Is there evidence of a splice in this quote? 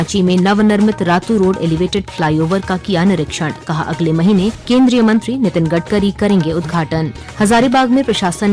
yes; 2 cuts; at 4.6 s, 7.2 s

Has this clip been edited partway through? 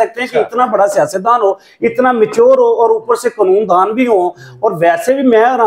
no; 0 cuts

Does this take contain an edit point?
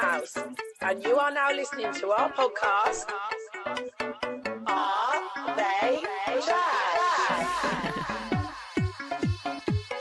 no; 0 cuts

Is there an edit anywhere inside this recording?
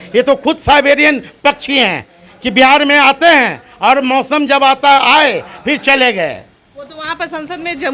no; 0 cuts

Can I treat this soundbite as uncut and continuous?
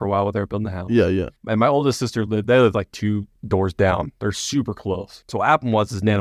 no; 3 cuts; at 1.4 s, 3.3 s, 5.1 s

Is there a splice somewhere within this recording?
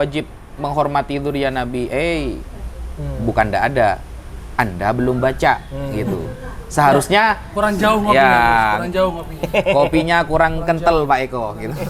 no; 0 cuts

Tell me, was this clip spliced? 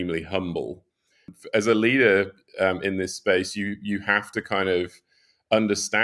yes; 1 cut; at 1.3 s

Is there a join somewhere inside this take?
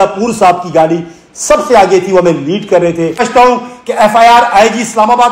yes; 1 cut; at 3.2 s

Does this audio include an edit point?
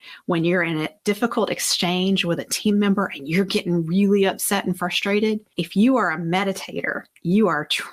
no; 0 cuts

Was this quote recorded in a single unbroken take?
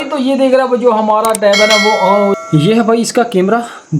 no; 1 cut; at 2.3 s

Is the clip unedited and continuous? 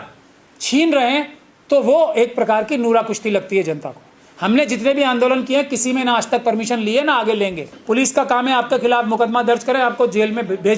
no; 1 cut; at 7.7 s

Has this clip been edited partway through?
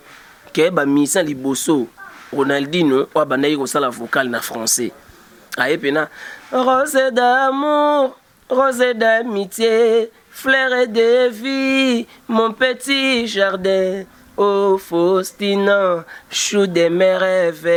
no; 0 cuts

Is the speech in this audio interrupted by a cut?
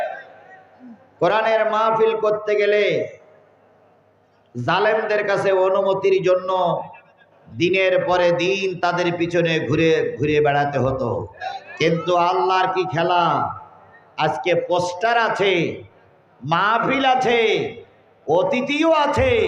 yes; 1 cut; at 11.4 s

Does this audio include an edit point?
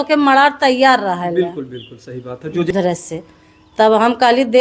yes; 1 cut; at 2.7 s

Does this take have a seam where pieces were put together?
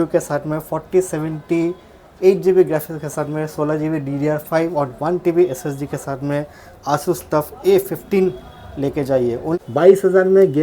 yes; 1 cut; at 9.6 s

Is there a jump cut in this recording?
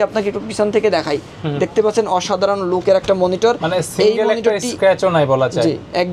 no; 0 cuts

